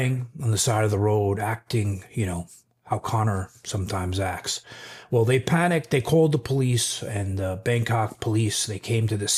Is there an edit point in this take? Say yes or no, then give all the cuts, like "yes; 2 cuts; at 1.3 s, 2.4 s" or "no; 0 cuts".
no; 0 cuts